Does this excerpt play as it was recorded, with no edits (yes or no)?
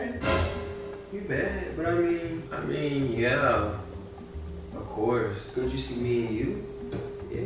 yes